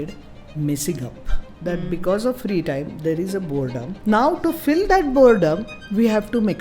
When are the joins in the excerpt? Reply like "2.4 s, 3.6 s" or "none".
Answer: 1.5 s, 3.9 s